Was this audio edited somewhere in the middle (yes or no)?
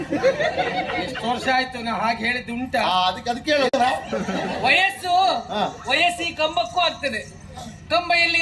yes